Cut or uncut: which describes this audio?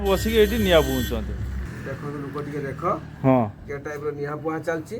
cut